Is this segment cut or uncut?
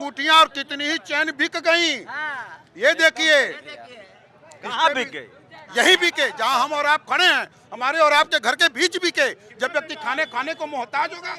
uncut